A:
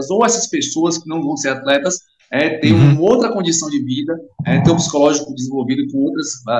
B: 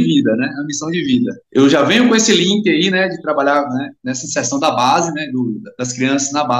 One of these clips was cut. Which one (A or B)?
B